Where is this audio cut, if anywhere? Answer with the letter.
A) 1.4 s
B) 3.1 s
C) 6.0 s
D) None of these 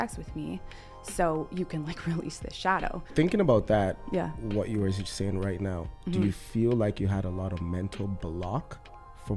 B